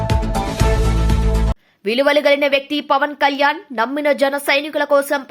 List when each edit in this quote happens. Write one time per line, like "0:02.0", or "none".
0:01.3

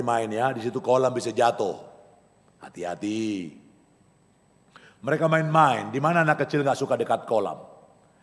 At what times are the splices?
none

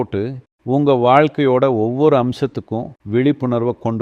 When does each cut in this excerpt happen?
none

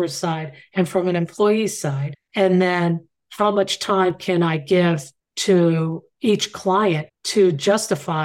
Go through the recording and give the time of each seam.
none

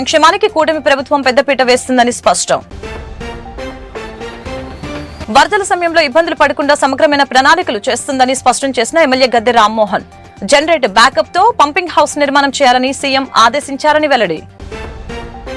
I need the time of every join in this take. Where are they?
none

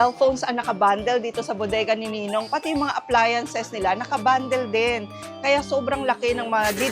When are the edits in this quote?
none

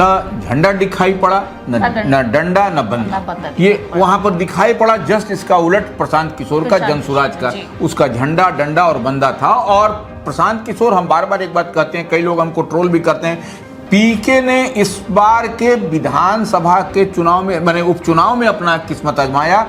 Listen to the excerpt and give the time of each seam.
none

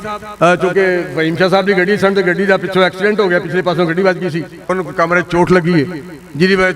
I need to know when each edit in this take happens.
0:04.5

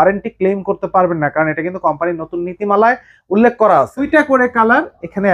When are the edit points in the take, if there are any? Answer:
0:04.1

